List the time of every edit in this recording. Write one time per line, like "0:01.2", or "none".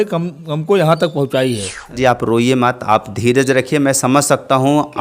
0:02.0